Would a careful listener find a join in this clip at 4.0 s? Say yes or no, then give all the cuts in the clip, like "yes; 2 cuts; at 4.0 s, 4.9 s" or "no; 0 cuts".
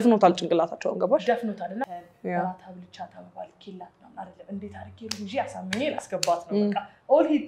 no; 1 cut; at 1.9 s